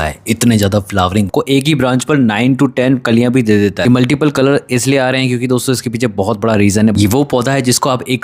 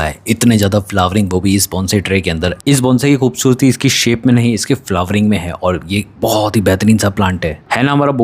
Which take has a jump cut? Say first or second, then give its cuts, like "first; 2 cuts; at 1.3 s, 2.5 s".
first; 3 cuts; at 1.3 s, 3.9 s, 6.9 s